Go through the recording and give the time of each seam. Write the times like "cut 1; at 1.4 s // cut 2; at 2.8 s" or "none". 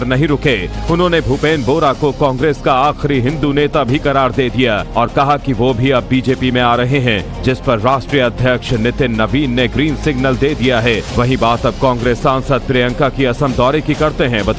none